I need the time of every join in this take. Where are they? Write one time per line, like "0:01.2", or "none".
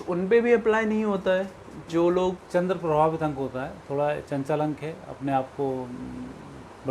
0:02.4